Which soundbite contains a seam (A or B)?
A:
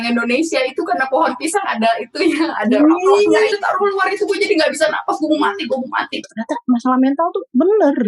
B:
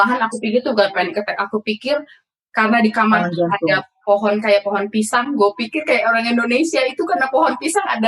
A